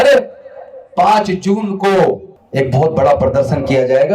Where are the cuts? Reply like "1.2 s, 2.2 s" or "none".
2.3 s